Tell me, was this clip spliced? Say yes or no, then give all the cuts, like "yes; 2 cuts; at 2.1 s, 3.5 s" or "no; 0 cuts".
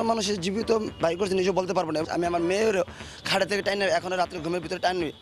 yes; 1 cut; at 2.0 s